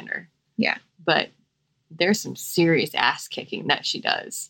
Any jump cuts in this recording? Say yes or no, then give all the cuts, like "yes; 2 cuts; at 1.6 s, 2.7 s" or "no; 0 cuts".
no; 0 cuts